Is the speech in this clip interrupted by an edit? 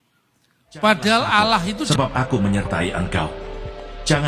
yes; 1 cut; at 1.8 s

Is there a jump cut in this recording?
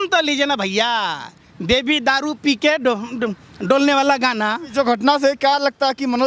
yes; 1 cut; at 4.6 s

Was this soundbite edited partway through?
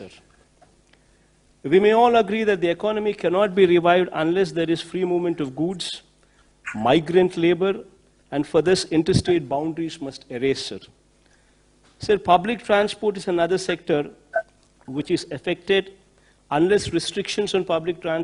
no; 0 cuts

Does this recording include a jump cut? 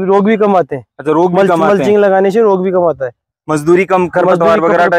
no; 0 cuts

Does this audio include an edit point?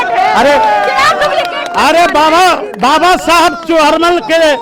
no; 0 cuts

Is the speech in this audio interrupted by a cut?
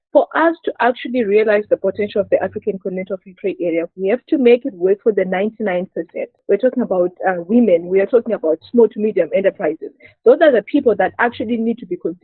yes; 1 cut; at 6.3 s

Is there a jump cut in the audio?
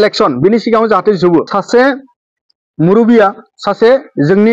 yes; 1 cut; at 1.5 s

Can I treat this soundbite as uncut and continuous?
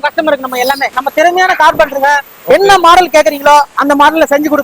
no; 1 cut; at 0.9 s

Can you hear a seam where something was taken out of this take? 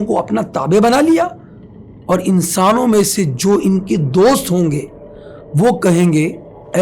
no; 0 cuts

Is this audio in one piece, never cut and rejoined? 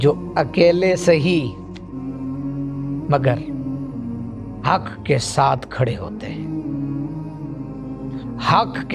yes; 0 cuts

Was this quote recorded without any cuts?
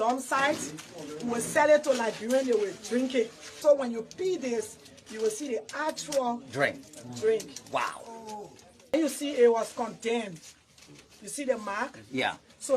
no; 2 cuts; at 3.5 s, 8.9 s

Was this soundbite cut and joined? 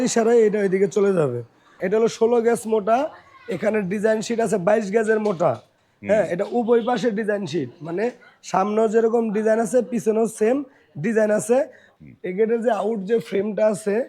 yes; 2 cuts; at 1.8 s, 11.8 s

